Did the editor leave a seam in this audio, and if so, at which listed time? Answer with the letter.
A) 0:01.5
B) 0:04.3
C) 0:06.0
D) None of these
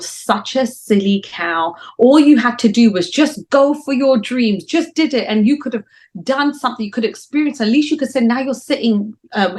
D